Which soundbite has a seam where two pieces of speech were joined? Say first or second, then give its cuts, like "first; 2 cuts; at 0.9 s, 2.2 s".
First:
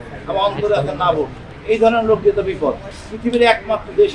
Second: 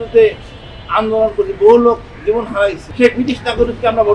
second; 1 cut; at 2.8 s